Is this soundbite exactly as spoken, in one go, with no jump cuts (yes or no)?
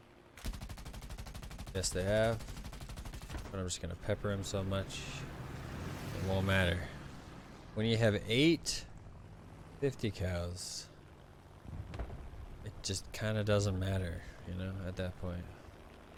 yes